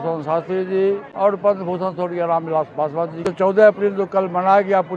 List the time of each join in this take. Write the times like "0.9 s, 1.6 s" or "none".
1.1 s, 3.3 s